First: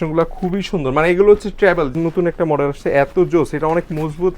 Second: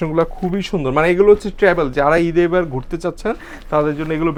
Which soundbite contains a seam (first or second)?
first